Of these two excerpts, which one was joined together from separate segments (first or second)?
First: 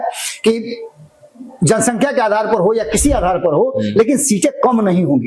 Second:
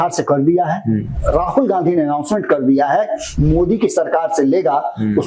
second